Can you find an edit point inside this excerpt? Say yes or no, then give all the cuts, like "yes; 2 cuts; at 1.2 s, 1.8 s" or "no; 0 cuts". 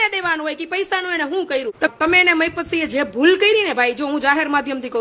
no; 0 cuts